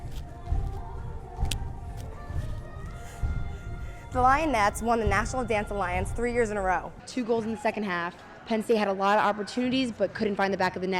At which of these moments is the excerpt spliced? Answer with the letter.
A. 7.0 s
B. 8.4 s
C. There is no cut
A